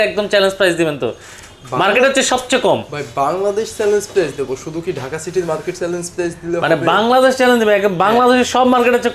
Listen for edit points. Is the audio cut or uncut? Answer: uncut